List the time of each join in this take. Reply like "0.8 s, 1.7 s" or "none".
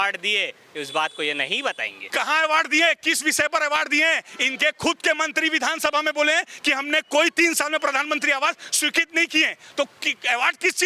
1.9 s